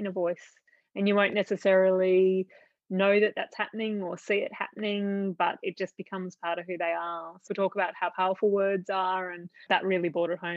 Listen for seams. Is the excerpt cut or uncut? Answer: cut